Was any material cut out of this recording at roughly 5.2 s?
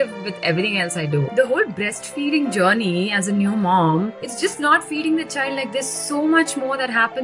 no; 1 cut; at 1.3 s

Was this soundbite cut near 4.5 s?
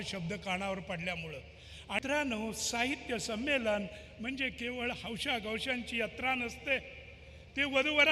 no; 1 cut; at 2.0 s

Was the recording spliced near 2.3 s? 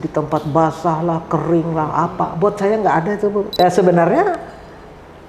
no; 1 cut; at 3.6 s

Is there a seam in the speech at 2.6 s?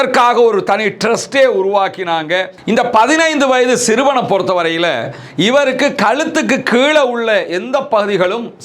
yes; 1 cut; at 2.6 s

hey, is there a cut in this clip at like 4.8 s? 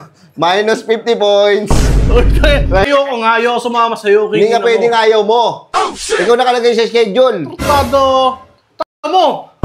no; 1 cut; at 2.9 s

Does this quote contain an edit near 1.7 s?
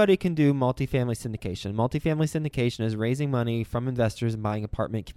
no; 0 cuts

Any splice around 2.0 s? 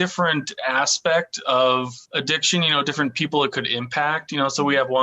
yes; 1 cut; at 2.0 s

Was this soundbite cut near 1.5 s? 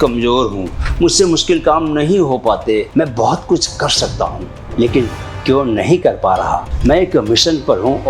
no; 2 cuts; at 2.9 s, 6.6 s

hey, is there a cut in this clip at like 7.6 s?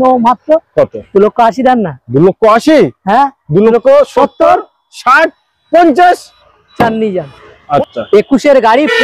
yes; 1 cut; at 7.6 s

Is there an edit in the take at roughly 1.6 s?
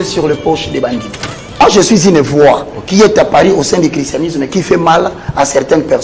yes; 1 cut; at 1.6 s

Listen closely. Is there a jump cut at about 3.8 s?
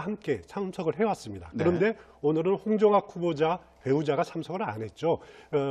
yes; 1 cut; at 3.8 s

